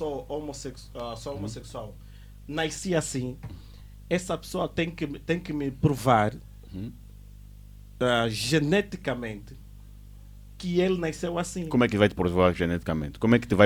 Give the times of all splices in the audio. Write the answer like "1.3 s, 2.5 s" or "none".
none